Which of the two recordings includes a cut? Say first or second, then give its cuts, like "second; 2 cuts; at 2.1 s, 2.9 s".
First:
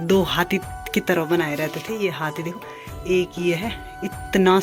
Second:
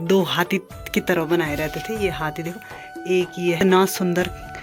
second; 1 cut; at 3.6 s